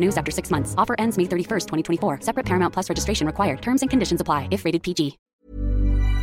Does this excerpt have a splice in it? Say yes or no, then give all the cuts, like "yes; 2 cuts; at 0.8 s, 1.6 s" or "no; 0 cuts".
yes; 1 cut; at 5.2 s